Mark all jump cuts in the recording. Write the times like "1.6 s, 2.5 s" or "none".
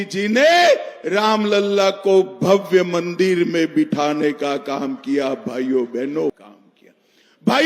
6.5 s